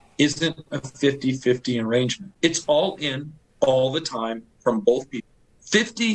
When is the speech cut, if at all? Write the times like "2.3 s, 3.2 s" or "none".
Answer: 2.2 s, 5.2 s

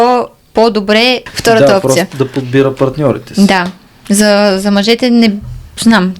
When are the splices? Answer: 1.3 s

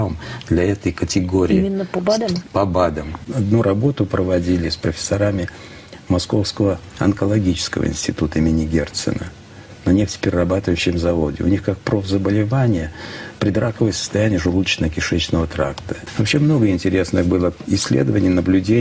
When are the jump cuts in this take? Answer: 3.3 s, 16.1 s

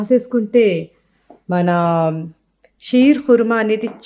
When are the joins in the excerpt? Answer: none

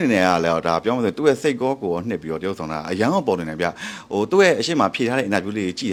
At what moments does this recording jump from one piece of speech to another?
none

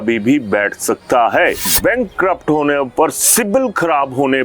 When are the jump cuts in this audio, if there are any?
1.7 s

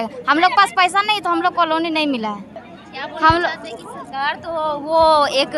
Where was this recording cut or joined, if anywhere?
none

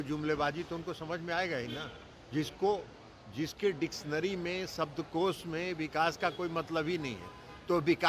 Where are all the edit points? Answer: none

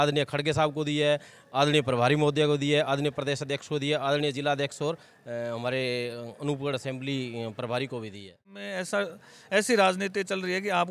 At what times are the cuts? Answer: 8.7 s

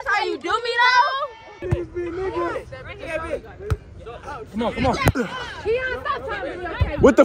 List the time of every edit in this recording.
1.6 s

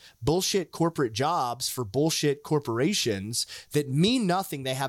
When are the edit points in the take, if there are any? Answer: none

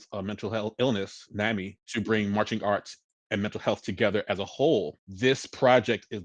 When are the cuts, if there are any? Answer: 1.8 s, 5.0 s

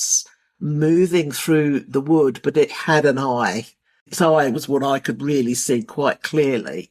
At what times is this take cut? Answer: 4.0 s

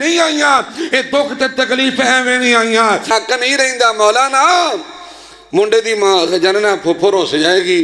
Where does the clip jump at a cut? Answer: 3.1 s

